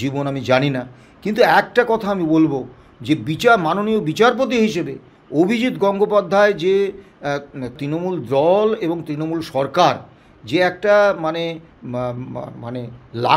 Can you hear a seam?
yes; 1 cut; at 7.8 s

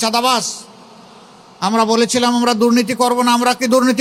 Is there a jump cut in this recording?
no; 0 cuts

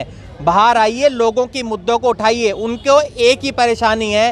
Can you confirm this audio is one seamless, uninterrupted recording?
yes; 0 cuts

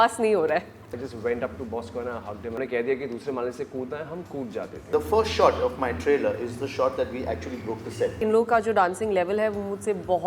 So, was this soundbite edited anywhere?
yes; 4 cuts; at 0.9 s, 2.6 s, 4.8 s, 8.1 s

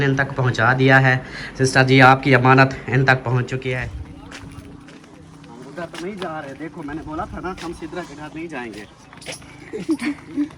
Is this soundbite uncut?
no; 1 cut; at 3.9 s

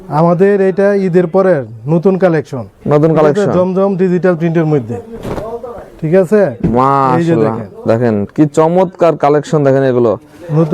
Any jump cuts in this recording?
no; 0 cuts

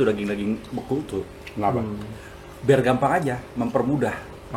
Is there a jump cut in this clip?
no; 0 cuts

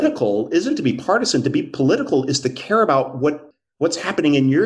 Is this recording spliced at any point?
yes; 1 cut; at 3.5 s

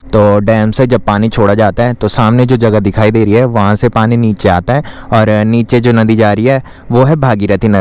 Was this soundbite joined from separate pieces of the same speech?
no; 0 cuts

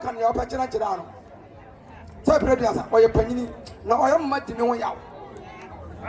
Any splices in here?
no; 0 cuts

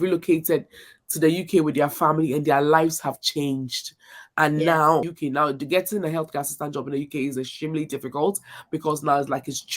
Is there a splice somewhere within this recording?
yes; 1 cut; at 5.1 s

